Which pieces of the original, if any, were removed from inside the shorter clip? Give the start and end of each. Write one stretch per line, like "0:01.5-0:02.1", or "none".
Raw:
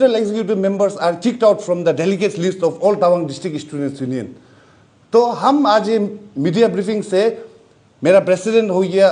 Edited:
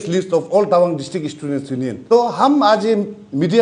0:04.3-0:05.0